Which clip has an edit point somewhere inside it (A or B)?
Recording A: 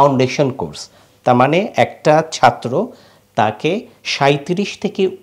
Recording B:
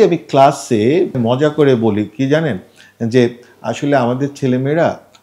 B